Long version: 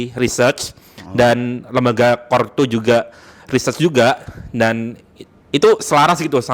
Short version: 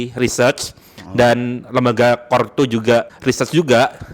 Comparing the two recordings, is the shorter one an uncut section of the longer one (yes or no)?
no